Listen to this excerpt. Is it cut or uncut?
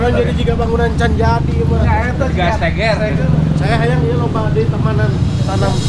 cut